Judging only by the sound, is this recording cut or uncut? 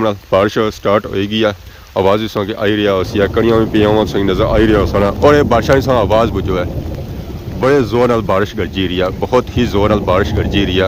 uncut